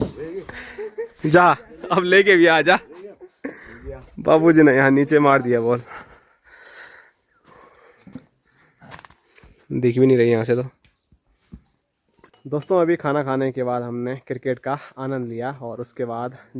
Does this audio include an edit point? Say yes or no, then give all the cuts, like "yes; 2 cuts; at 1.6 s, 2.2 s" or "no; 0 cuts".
no; 0 cuts